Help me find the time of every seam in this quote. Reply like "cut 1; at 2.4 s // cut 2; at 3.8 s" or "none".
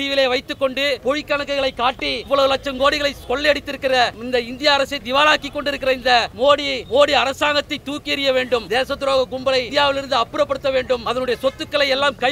cut 1; at 1.0 s // cut 2; at 2.2 s // cut 3; at 4.2 s // cut 4; at 6.4 s // cut 5; at 8.6 s // cut 6; at 9.7 s // cut 7; at 11.0 s

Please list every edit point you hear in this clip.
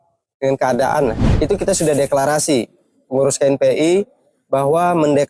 cut 1; at 1.2 s

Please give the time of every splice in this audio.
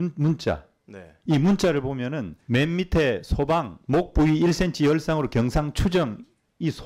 cut 1; at 2.3 s

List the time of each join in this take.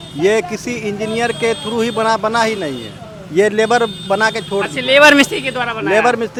none

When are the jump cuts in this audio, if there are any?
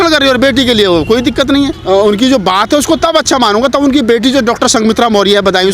cut 1; at 1.8 s

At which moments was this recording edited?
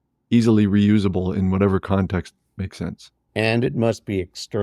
cut 1; at 3.1 s

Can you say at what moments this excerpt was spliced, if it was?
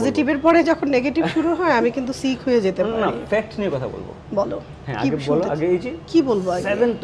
none

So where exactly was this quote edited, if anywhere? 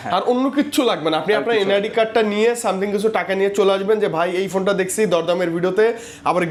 none

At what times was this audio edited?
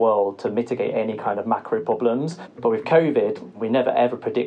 cut 1; at 2.4 s // cut 2; at 3.5 s

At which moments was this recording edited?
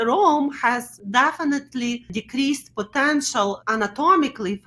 cut 1; at 0.9 s // cut 2; at 2.2 s // cut 3; at 3.6 s

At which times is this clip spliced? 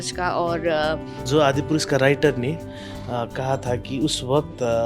cut 1; at 1.1 s

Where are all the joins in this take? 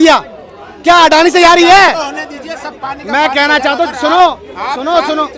none

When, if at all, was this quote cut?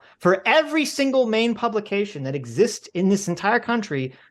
none

